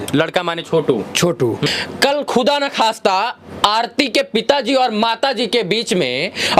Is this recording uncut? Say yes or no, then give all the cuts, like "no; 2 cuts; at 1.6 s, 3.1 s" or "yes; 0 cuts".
no; 1 cut; at 1.7 s